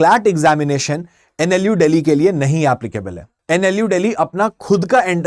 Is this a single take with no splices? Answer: no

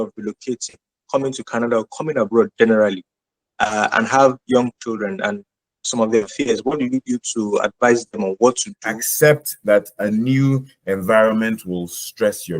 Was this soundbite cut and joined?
yes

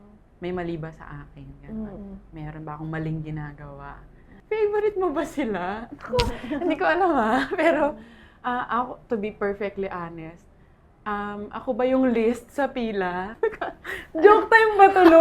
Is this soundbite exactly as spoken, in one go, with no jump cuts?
no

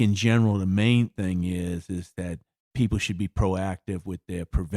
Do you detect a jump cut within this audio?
yes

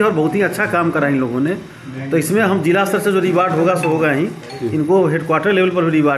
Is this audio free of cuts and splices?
yes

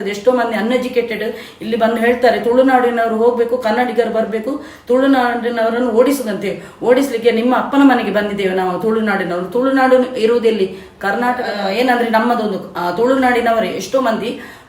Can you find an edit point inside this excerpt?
yes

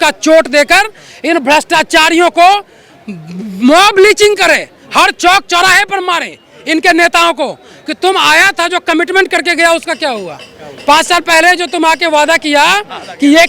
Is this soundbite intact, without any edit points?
yes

